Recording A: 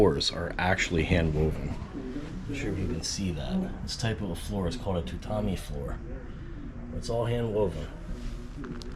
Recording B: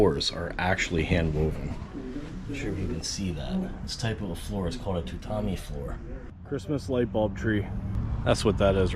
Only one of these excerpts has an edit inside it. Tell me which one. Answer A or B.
B